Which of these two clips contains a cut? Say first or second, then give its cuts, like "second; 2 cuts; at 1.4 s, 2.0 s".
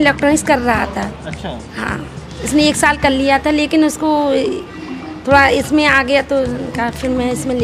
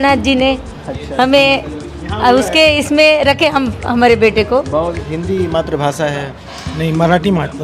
second; 1 cut; at 5.0 s